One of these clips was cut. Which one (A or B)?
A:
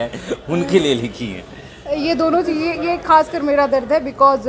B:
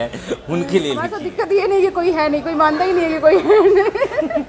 B